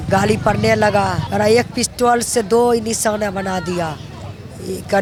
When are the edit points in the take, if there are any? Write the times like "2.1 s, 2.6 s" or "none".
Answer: none

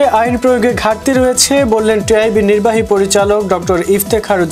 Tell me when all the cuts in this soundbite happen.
none

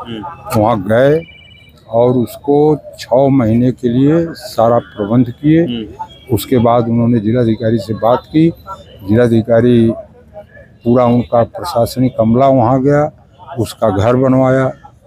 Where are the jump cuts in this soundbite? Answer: none

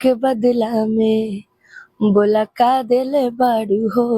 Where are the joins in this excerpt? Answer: none

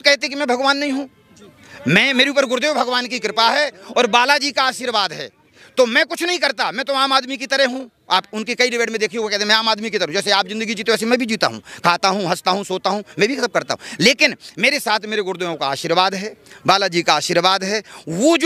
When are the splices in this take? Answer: none

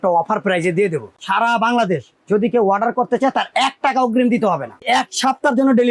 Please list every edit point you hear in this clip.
1.1 s, 4.8 s

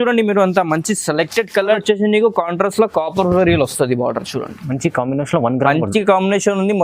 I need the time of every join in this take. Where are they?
1.8 s

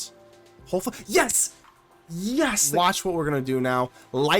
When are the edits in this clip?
2.6 s

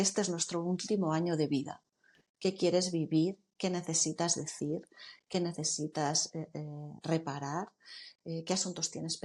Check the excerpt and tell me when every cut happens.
none

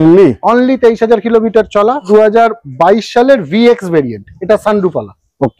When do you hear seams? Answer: 2.1 s

